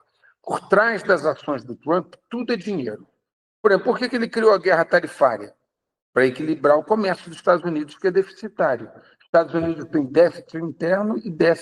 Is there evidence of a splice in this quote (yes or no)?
no